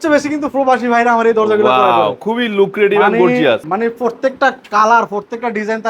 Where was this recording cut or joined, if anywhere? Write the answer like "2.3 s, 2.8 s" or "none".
3.7 s